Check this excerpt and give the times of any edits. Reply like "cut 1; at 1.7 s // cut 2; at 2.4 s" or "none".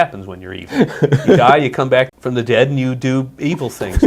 cut 1; at 2.1 s

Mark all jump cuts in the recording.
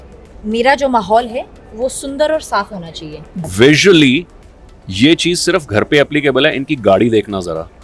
cut 1; at 3.5 s

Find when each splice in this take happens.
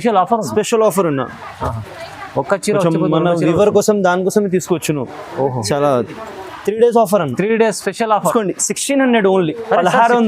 cut 1; at 8.3 s

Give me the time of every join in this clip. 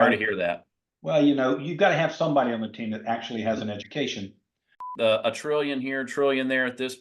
cut 1; at 4.9 s

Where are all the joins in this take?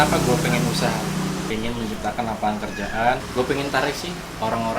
cut 1; at 1.5 s // cut 2; at 3.2 s

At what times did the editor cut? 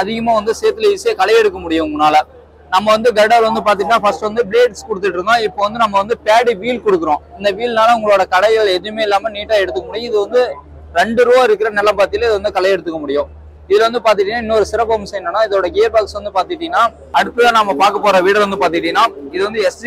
cut 1; at 17.0 s

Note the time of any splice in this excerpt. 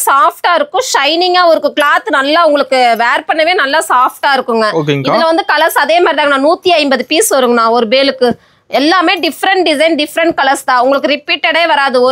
none

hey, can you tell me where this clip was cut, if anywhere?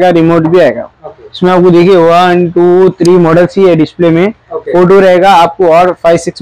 none

